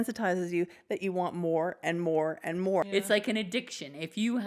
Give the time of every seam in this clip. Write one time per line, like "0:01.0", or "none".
0:02.9